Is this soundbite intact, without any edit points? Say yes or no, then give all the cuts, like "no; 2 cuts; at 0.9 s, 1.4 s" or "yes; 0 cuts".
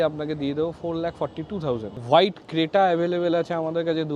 no; 1 cut; at 2.0 s